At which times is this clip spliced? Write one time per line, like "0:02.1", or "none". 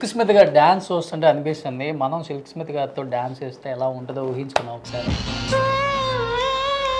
none